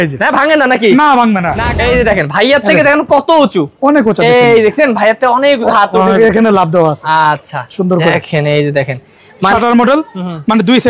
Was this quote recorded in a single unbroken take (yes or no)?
no